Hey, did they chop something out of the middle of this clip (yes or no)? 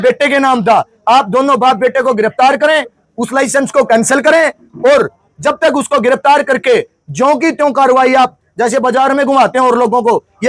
no